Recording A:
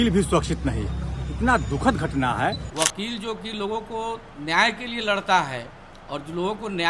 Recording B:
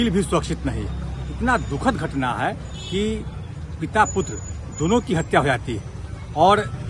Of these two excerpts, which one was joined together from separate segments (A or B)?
A